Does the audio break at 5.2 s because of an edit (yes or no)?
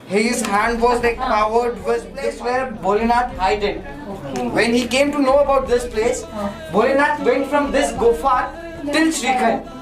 no